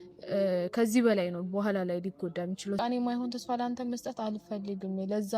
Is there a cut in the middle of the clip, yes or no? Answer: yes